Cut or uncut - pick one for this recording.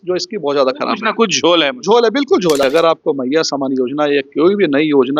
cut